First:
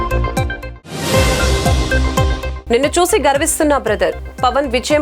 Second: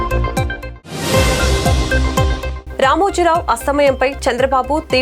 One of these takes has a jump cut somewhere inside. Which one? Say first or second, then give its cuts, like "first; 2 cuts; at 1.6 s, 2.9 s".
second; 1 cut; at 2.5 s